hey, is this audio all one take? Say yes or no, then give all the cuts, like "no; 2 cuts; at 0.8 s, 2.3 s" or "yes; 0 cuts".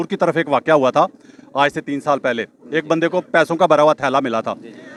yes; 0 cuts